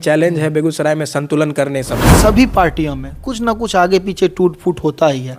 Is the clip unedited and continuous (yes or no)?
no